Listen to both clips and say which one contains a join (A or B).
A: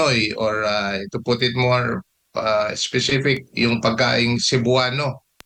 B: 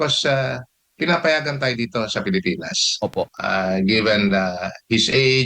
B